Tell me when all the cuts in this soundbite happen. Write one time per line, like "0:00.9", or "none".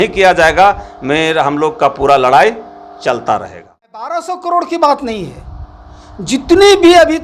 0:04.1